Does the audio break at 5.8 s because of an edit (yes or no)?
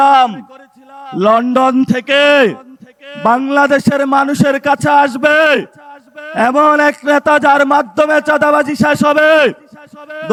no